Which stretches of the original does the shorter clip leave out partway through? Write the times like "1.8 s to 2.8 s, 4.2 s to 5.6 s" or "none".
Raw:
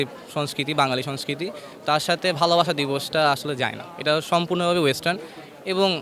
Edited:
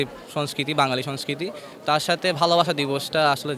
none